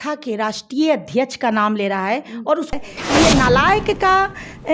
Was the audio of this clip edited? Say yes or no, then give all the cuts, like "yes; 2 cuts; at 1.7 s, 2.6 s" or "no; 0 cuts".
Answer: yes; 1 cut; at 2.7 s